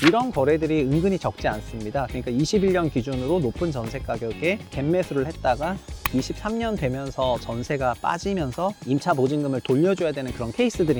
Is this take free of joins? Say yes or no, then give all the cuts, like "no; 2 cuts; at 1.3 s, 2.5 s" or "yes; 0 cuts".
yes; 0 cuts